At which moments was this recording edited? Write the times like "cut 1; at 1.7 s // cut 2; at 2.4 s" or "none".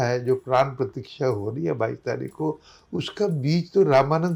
none